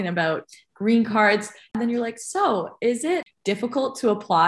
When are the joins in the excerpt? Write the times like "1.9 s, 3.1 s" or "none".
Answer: 1.7 s, 3.3 s